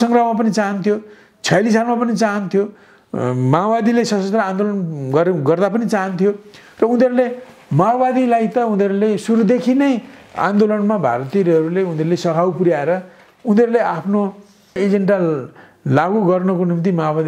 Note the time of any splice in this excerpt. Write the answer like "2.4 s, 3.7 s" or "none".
14.8 s

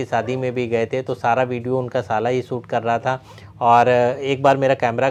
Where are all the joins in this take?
none

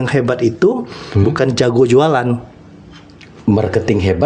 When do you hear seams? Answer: none

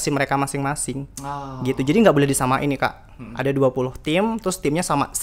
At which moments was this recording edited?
none

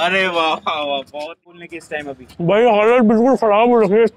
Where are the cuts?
1.3 s

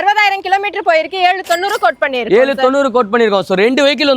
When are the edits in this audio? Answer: none

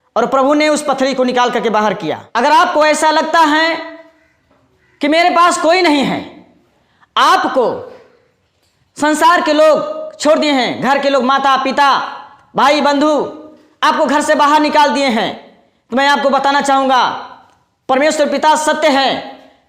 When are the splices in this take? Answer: 2.2 s

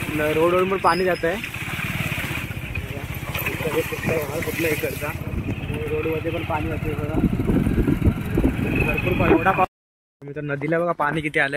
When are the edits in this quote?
9.7 s

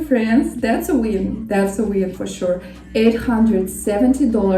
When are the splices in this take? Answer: none

